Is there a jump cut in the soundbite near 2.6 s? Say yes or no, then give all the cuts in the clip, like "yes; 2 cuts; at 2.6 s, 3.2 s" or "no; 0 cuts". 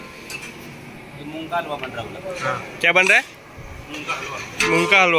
no; 0 cuts